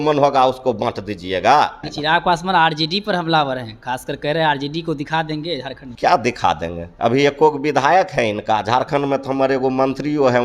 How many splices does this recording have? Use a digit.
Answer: 2